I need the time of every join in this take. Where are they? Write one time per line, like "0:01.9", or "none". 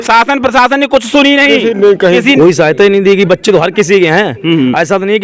0:02.2